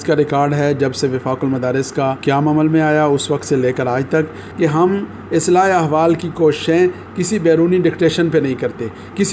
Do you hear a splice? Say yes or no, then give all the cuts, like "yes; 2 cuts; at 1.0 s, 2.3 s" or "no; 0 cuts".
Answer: yes; 2 cuts; at 2.2 s, 4.4 s